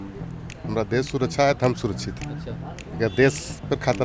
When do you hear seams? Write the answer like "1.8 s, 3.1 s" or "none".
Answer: none